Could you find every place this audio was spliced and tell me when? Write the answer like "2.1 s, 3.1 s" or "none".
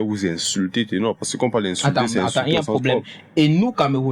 none